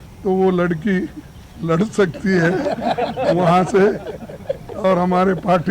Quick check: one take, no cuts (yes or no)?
yes